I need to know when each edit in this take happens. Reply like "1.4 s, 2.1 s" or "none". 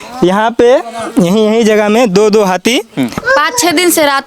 3.2 s